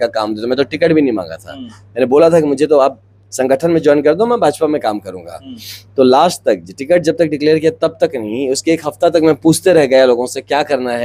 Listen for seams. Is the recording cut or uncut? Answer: uncut